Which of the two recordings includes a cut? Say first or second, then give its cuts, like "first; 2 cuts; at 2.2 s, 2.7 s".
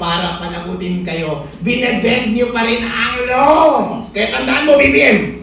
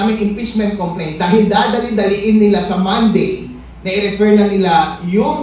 first; 1 cut; at 4.0 s